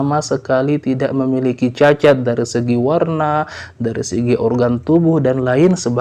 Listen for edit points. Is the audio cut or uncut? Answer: uncut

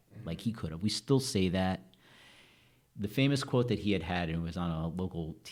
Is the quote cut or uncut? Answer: uncut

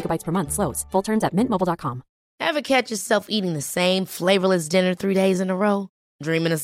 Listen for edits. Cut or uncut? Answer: cut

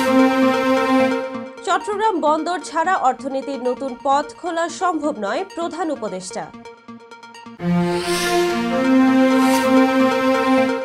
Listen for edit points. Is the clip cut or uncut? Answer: cut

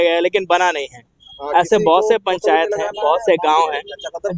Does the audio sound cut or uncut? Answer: uncut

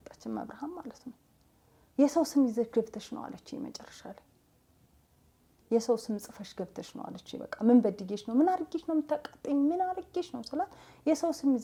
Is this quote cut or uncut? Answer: uncut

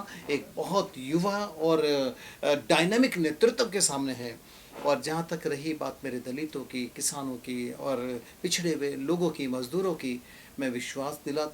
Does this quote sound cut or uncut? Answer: uncut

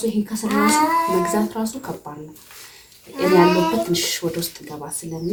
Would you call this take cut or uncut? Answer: uncut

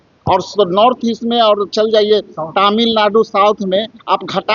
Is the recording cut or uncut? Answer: uncut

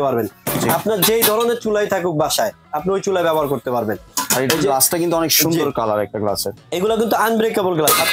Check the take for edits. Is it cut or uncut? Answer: uncut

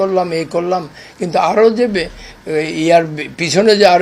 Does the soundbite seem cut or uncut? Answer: uncut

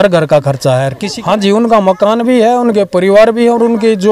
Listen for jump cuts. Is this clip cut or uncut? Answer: cut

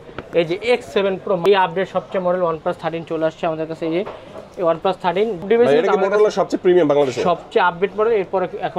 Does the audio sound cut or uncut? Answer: cut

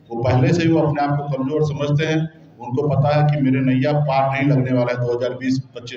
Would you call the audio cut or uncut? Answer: uncut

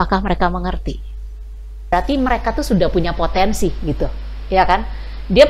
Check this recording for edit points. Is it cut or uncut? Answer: cut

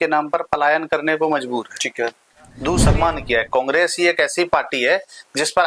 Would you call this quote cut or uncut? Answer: cut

